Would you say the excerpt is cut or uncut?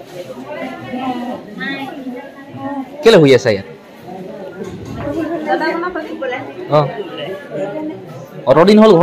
uncut